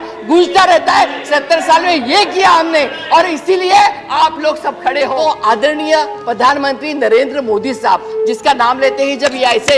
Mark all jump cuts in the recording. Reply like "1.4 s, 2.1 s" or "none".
5.1 s

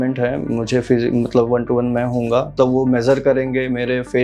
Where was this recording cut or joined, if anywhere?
2.5 s

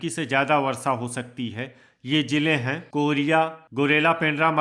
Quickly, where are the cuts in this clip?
3.6 s

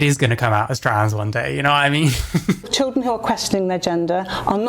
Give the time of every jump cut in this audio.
2.7 s

